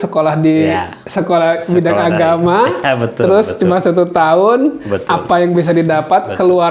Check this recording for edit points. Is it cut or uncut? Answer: uncut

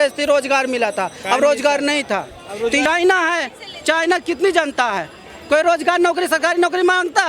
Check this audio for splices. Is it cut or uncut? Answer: cut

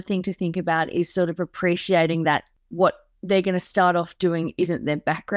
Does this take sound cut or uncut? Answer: cut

